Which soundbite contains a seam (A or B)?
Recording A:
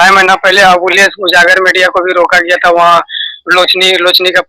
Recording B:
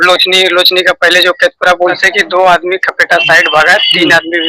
B